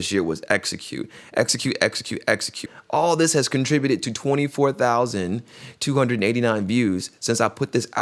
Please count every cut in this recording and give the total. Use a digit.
1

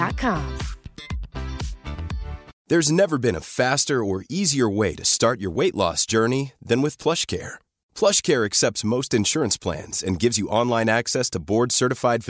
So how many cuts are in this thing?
1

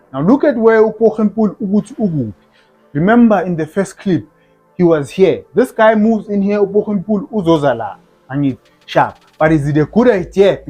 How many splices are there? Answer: 0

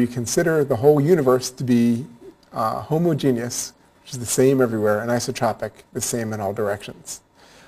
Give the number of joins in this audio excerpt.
1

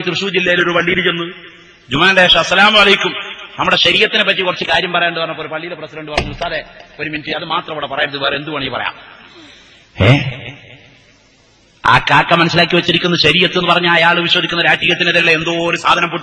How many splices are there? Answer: 1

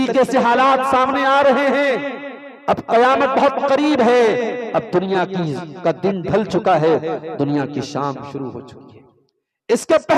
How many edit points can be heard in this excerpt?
0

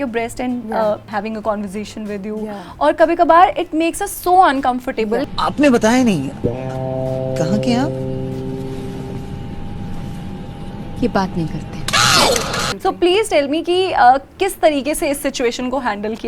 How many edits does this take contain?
3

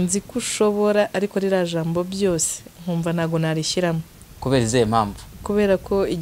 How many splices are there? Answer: 0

